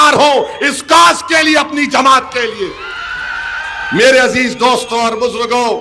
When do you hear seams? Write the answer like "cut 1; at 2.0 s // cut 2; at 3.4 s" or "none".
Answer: none